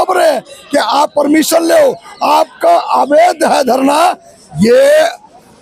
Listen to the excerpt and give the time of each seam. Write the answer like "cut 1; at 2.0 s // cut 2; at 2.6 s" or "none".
none